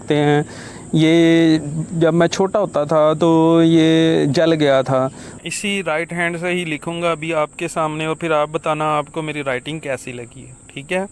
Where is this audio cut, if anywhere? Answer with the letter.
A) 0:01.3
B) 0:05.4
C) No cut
B